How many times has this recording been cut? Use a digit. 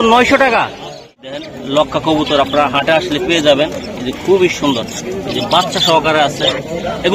1